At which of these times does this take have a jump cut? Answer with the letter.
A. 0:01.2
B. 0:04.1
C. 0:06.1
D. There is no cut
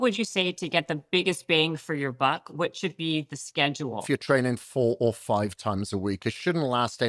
B